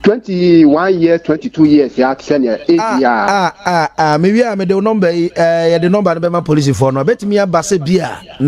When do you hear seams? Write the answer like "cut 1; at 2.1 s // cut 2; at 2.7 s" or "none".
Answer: none